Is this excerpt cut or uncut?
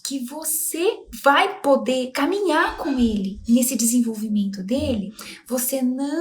cut